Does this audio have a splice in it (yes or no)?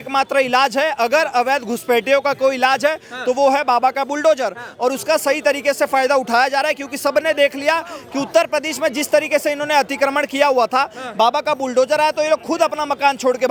no